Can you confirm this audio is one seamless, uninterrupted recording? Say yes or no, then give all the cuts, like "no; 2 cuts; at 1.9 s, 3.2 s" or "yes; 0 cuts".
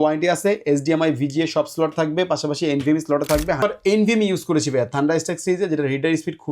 no; 1 cut; at 3.6 s